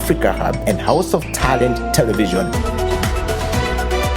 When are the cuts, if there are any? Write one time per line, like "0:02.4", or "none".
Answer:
0:02.6